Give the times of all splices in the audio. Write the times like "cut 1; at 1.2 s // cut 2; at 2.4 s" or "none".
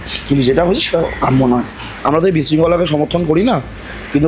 cut 1; at 2.0 s

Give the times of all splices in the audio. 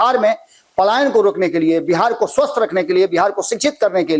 none

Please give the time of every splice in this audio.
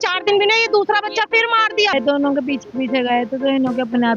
cut 1; at 1.9 s

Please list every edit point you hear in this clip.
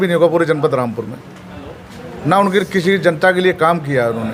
none

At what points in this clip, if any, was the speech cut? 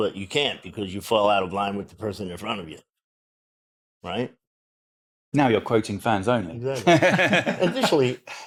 none

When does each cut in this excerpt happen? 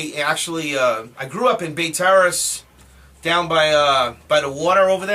cut 1; at 1.3 s

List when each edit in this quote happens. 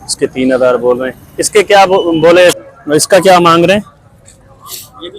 cut 1; at 2.9 s

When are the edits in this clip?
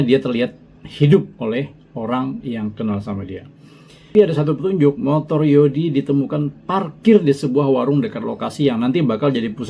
cut 1; at 4.1 s

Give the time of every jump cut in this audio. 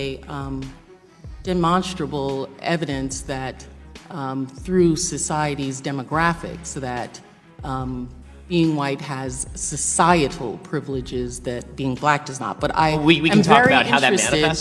cut 1; at 12.0 s

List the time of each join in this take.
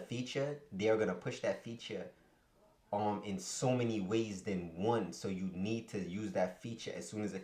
none

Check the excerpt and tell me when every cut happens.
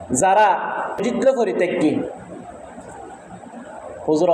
cut 1; at 1.0 s

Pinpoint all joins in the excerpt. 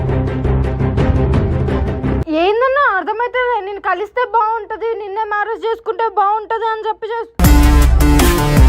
cut 1; at 2.2 s

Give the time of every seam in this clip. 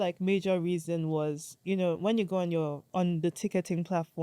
cut 1; at 2.8 s

